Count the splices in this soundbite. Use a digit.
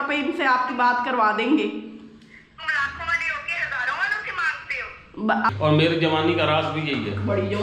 1